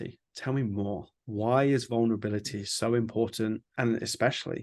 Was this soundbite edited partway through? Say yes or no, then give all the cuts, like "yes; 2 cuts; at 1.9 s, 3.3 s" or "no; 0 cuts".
yes; 1 cut; at 3.7 s